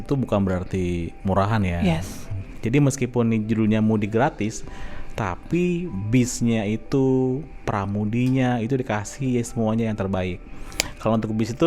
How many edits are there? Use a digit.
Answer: 1